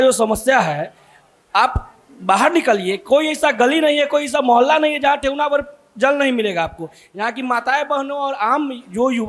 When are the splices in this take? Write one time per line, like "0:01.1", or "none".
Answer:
none